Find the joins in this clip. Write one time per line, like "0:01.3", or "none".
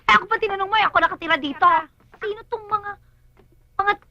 0:02.0